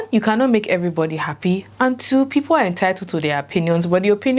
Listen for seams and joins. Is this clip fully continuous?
yes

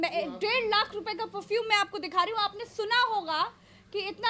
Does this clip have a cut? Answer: no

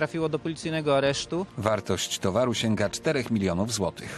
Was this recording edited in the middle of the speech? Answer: yes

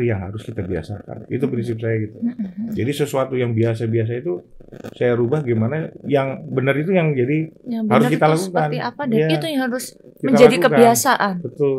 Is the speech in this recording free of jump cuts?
yes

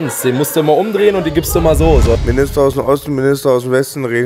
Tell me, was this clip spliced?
yes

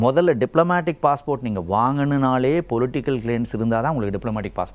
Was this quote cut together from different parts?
no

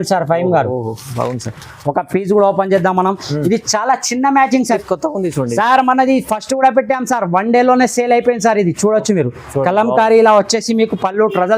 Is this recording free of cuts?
no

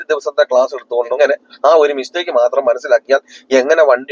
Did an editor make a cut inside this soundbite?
yes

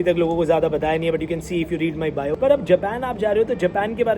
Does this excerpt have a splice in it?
yes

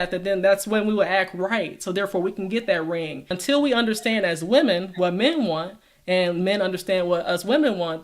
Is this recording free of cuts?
no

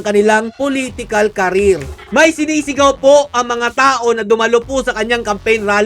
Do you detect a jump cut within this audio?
yes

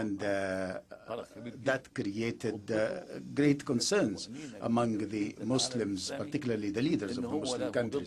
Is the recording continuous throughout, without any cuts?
yes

